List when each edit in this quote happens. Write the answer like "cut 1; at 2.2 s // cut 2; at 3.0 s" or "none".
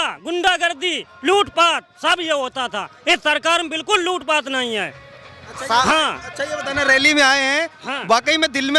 none